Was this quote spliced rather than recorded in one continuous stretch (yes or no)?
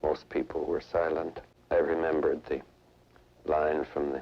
yes